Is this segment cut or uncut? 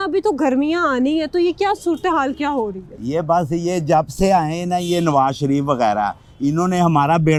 uncut